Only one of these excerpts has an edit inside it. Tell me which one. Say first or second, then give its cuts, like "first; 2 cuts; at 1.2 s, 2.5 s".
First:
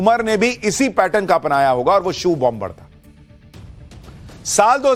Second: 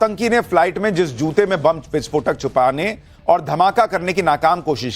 second; 1 cut; at 1.5 s